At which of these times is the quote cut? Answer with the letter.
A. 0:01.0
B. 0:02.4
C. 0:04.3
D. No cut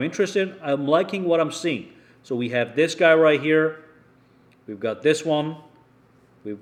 D